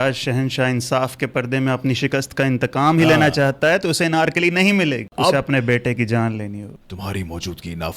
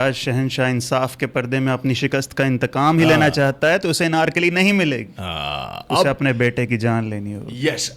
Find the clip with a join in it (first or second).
first